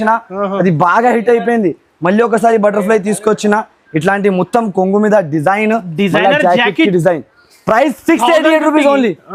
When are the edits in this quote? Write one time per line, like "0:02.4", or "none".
none